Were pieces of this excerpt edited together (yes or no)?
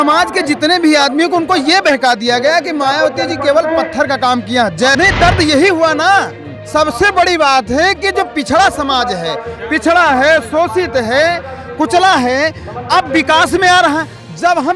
yes